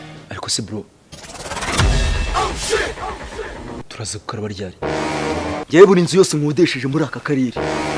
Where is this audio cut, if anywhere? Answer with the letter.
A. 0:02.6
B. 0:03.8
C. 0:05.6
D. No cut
C